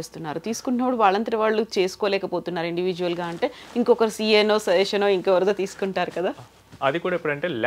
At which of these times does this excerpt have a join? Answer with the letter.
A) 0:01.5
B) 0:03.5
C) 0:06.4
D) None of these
D